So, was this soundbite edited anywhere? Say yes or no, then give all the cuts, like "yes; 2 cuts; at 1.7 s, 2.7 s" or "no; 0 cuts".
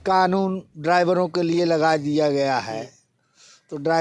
no; 0 cuts